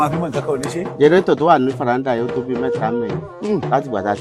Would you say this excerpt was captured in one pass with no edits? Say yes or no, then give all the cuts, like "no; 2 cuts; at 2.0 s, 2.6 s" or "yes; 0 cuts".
no; 1 cut; at 0.9 s